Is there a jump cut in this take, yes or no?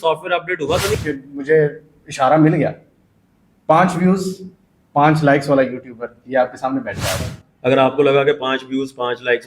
yes